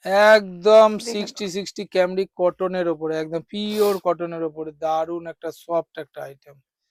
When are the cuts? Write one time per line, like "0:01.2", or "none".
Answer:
none